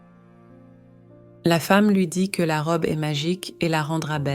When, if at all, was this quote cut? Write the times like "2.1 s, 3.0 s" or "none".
0.9 s